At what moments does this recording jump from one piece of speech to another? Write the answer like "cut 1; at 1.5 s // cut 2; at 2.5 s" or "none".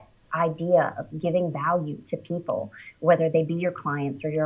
none